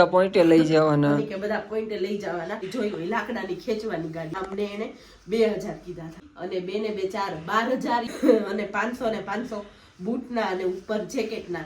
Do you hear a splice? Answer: yes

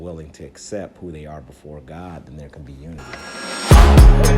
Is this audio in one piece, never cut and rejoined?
no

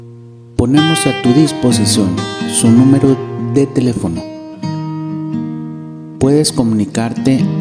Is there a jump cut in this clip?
no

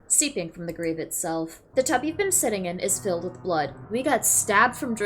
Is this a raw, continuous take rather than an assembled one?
no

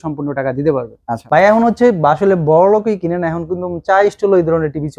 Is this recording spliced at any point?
yes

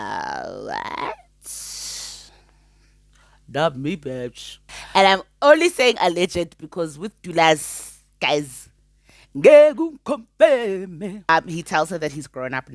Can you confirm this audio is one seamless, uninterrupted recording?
no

